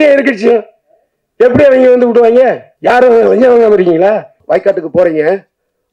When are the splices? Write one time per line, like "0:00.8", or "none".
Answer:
0:02.7
0:04.3